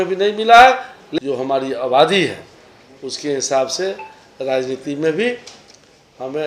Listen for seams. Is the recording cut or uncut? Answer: cut